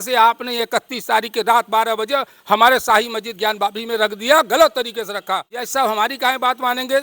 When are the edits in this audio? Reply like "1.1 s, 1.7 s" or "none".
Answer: 5.6 s